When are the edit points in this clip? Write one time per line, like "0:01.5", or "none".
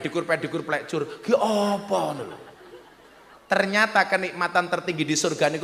none